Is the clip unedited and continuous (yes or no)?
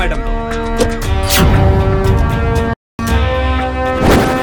yes